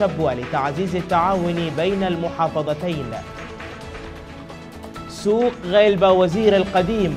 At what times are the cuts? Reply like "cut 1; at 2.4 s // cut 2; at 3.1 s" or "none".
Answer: cut 1; at 3.6 s // cut 2; at 5.2 s